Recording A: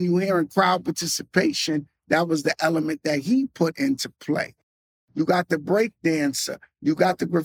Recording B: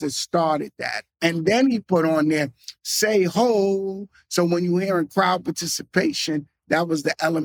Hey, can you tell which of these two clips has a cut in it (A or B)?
A